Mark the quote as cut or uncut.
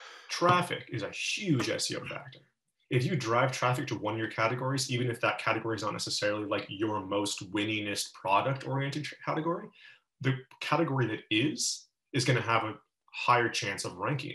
uncut